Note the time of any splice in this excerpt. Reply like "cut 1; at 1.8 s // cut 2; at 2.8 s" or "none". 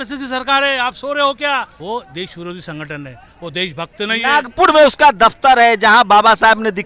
cut 1; at 1.7 s

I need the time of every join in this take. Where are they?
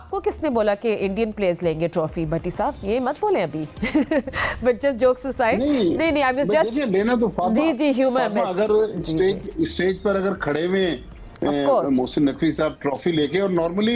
none

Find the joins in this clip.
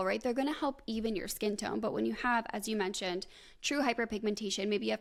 none

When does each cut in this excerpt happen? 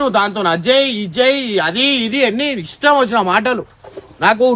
none

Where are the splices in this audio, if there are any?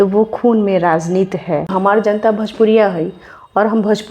cut 1; at 1.7 s

